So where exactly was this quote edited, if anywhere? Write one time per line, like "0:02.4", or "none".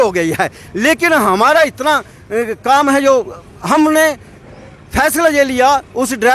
none